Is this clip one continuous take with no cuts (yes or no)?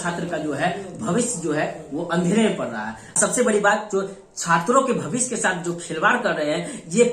no